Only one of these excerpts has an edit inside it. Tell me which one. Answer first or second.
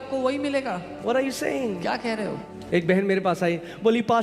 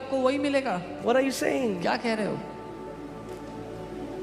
first